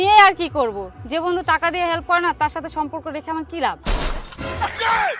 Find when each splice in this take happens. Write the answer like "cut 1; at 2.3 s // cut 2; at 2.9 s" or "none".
cut 1; at 3.8 s